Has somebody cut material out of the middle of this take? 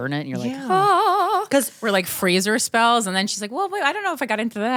no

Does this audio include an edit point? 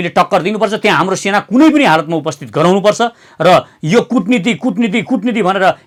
no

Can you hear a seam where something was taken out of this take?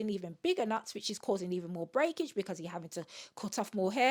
no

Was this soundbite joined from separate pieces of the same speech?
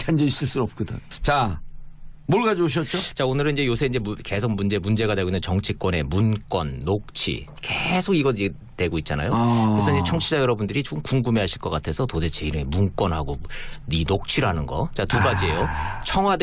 yes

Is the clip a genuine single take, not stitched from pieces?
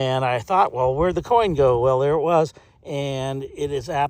yes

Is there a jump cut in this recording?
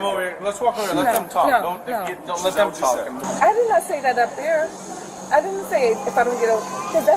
yes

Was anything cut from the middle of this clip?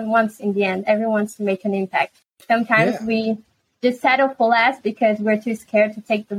no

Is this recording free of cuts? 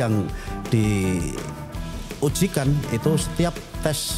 yes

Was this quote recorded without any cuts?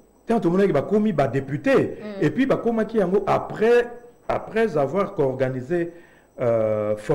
yes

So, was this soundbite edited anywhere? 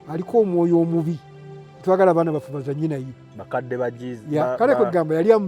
no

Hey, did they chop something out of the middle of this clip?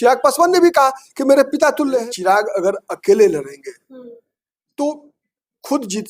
yes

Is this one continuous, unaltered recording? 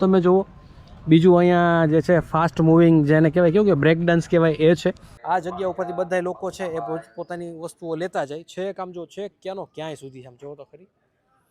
no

